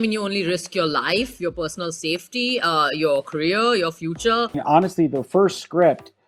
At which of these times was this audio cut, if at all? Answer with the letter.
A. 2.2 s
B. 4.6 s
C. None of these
B